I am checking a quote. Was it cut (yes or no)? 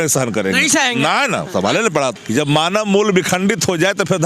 yes